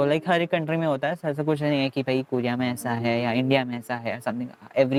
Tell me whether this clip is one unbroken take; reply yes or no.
yes